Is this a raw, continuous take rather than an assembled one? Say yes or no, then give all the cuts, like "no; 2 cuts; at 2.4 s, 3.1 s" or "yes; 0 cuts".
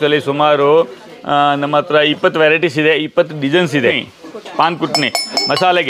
no; 1 cut; at 4.1 s